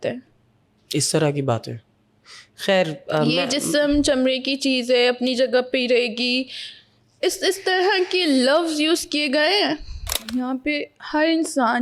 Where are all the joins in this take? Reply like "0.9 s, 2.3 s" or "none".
10.2 s